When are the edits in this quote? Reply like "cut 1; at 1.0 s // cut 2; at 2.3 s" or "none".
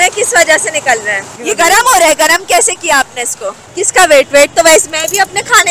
cut 1; at 1.3 s // cut 2; at 3.6 s

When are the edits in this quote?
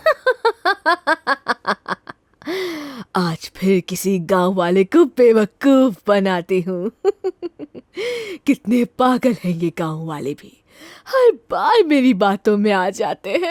none

